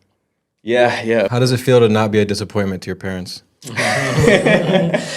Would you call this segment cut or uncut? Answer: cut